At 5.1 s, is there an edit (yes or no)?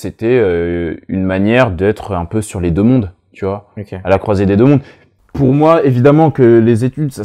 yes